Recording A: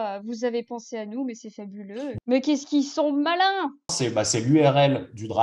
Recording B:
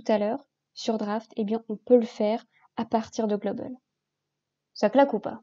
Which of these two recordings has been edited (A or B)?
A